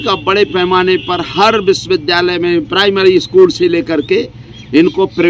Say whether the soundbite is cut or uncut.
uncut